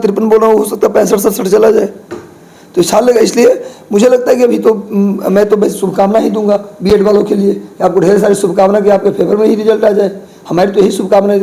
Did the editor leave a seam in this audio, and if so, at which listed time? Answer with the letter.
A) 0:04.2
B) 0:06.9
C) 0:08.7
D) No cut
D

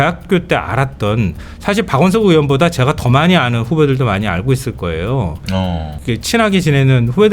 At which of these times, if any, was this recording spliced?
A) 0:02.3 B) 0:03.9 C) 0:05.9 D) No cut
C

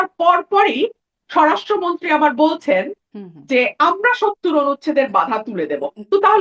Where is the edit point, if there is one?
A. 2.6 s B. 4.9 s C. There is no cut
C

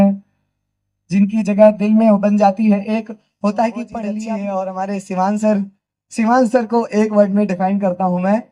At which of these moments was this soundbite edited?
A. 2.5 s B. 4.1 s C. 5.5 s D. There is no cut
B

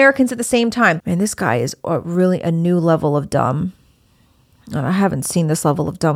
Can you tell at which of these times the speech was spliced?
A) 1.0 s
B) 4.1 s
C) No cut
A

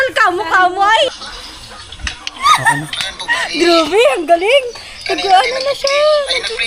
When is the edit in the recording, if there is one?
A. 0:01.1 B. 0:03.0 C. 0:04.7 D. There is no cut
A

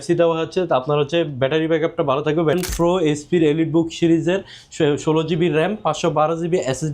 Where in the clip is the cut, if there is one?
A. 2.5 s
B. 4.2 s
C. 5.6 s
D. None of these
A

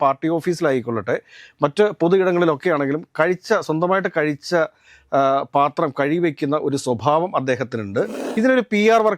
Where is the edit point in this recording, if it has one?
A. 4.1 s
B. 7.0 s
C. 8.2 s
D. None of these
C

